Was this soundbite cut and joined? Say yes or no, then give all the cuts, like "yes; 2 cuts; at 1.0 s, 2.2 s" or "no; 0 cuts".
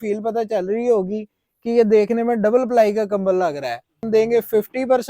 yes; 1 cut; at 4.0 s